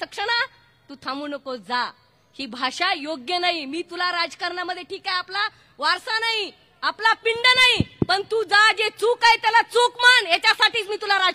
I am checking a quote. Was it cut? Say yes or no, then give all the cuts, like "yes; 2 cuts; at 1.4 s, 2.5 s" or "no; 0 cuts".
no; 0 cuts